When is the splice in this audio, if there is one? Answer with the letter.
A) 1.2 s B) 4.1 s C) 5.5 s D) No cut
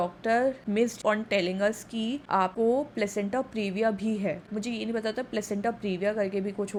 D